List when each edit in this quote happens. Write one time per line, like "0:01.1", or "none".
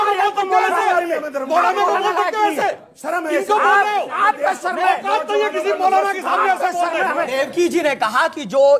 none

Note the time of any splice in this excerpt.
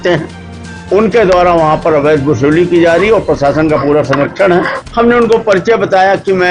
0:04.8

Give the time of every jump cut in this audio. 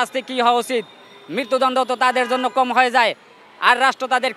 none

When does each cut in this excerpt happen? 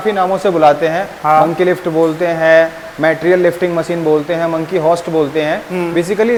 none

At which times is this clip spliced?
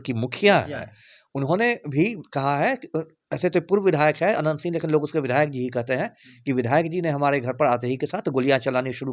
none

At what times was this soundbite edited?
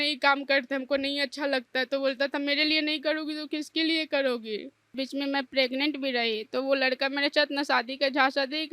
0:04.9

